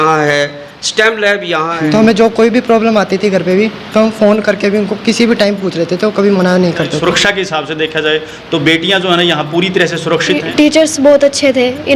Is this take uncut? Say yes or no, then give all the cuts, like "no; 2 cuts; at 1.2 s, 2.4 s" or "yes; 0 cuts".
no; 3 cuts; at 1.8 s, 6.9 s, 10.4 s